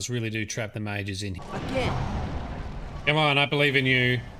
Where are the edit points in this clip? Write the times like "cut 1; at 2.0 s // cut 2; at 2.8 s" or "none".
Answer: cut 1; at 1.4 s